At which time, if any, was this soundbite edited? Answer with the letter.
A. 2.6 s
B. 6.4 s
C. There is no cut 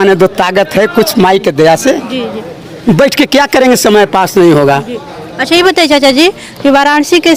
C